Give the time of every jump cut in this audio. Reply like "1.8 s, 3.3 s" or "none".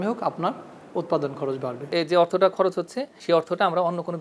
1.8 s, 3.1 s